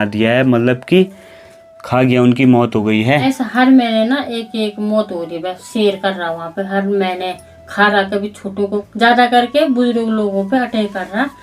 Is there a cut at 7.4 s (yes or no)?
no